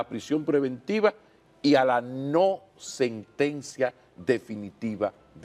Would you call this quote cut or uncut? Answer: uncut